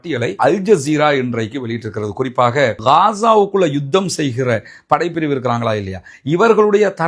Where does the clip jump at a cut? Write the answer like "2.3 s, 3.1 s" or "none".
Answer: 2.8 s